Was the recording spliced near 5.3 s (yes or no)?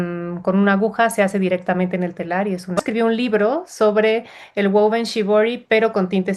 no